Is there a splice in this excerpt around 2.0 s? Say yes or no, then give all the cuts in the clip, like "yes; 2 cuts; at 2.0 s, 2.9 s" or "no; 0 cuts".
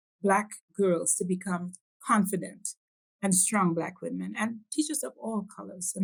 no; 0 cuts